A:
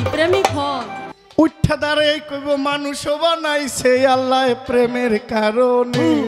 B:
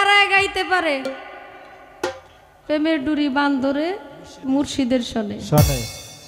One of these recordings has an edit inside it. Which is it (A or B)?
A